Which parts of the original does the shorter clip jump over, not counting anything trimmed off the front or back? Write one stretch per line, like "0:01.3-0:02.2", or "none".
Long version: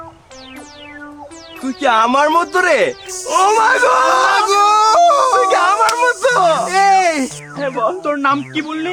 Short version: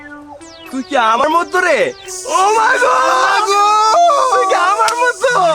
0:02.1-0:02.2

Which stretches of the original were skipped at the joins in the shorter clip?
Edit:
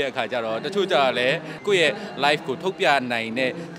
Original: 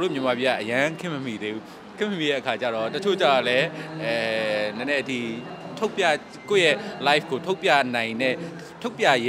0:03.8-0:06.3

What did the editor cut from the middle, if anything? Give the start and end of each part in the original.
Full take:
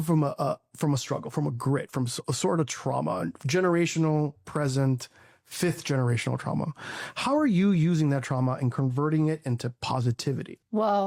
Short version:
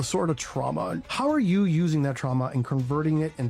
0:03.4-0:07.1

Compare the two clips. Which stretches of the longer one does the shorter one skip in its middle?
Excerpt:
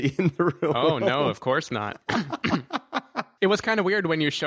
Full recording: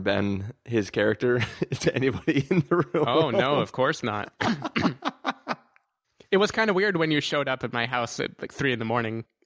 0:05.5-0:06.1

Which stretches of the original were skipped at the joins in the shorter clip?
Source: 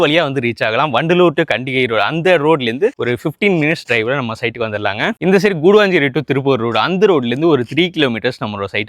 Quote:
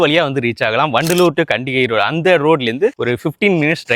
none

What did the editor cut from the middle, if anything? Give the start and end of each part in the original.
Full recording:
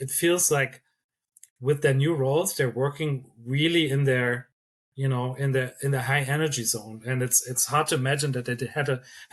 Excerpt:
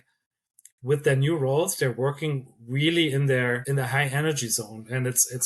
0:04.4-0:05.8

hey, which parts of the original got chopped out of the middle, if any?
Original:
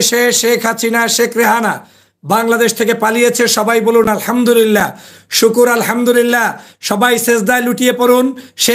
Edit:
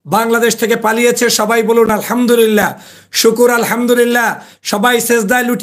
none

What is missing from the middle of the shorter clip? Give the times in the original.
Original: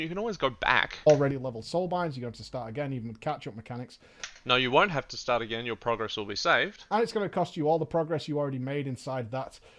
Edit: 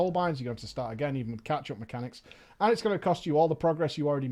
0:04.2-0:06.8

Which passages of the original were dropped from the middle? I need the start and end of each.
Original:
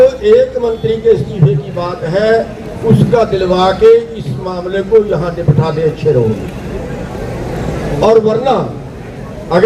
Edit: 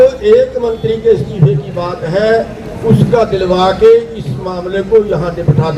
none

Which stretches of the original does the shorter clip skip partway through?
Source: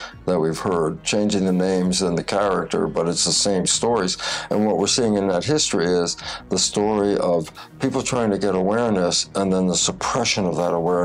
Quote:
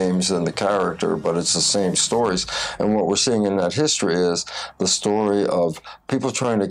none

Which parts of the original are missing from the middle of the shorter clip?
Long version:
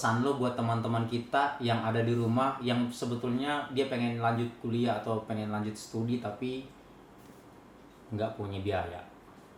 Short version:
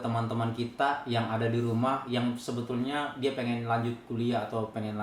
none

